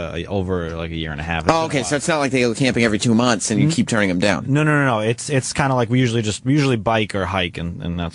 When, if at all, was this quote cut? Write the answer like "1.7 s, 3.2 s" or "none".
none